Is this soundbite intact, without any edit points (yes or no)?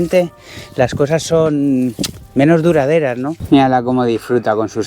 no